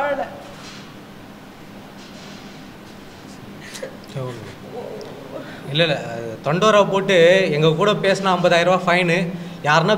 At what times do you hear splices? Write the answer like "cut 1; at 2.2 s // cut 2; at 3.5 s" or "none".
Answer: none